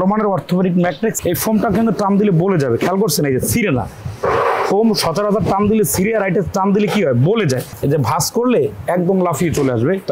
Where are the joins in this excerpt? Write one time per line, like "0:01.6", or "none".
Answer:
0:01.2
0:07.7